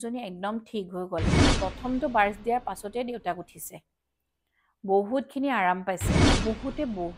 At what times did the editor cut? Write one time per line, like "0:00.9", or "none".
0:01.5
0:06.3